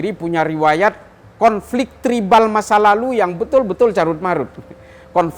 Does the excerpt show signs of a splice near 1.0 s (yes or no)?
no